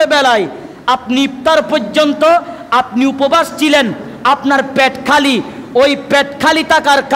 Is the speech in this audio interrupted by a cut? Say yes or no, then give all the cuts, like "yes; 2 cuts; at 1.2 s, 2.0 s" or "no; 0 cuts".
no; 0 cuts